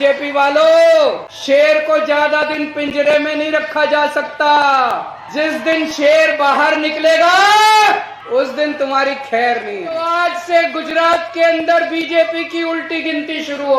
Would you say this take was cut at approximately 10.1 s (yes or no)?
yes